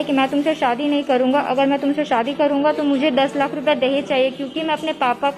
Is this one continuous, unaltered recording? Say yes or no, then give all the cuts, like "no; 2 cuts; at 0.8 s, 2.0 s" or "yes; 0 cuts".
yes; 0 cuts